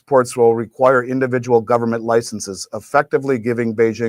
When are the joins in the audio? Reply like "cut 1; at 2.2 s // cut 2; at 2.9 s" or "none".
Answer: none